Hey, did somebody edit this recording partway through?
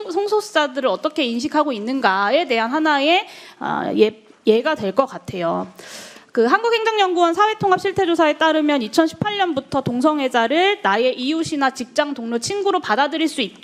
no; 0 cuts

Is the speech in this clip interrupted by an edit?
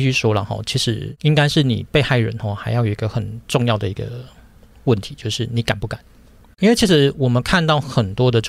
yes; 1 cut; at 1.1 s

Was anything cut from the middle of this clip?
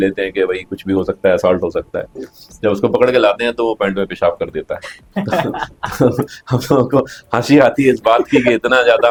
no; 0 cuts

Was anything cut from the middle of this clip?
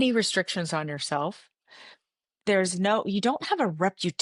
no; 0 cuts

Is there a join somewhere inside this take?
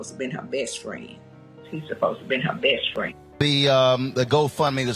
yes; 1 cut; at 3.4 s

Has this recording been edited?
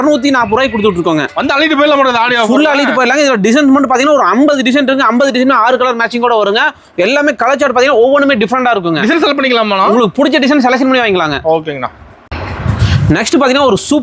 no; 0 cuts

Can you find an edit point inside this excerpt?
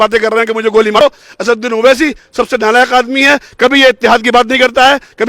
yes; 1 cut; at 1.0 s

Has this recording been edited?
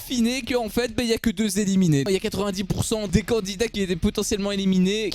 yes; 1 cut; at 2.1 s

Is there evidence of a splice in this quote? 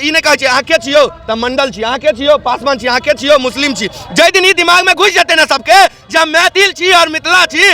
no; 0 cuts

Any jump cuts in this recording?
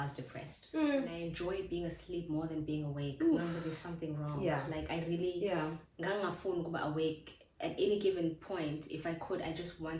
yes; 1 cut; at 1.2 s

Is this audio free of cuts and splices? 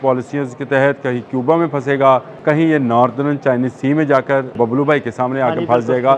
no; 2 cuts; at 2.3 s, 4.5 s

